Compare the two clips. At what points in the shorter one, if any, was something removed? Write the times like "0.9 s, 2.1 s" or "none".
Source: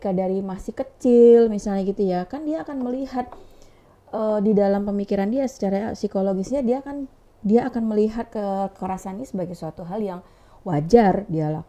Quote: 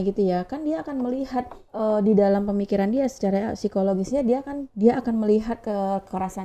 1.6 s, 4.6 s